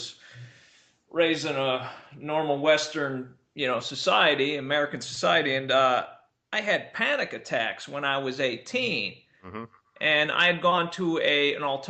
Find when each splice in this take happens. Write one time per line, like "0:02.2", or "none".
0:06.9